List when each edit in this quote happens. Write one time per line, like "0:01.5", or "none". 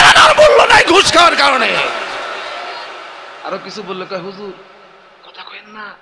0:03.1